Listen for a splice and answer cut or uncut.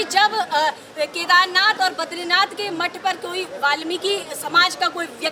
uncut